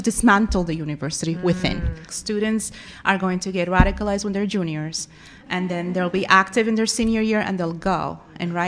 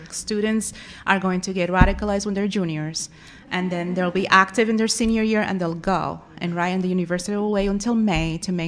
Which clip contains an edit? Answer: first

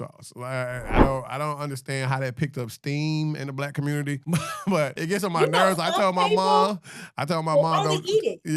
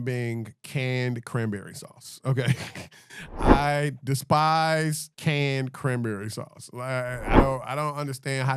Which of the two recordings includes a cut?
first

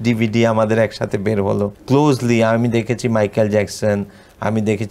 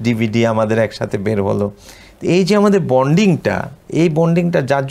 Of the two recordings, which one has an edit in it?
first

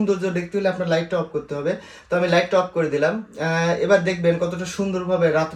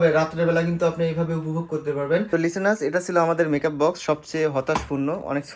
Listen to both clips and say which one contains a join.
second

